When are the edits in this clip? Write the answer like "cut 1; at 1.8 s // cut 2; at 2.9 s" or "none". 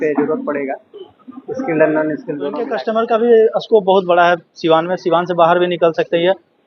cut 1; at 2.7 s

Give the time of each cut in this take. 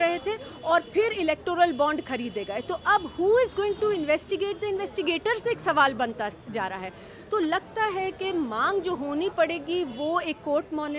none

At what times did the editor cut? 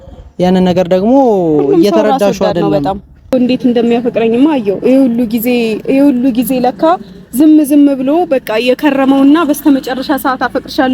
cut 1; at 3.3 s

